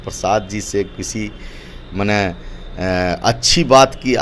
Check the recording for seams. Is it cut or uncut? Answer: uncut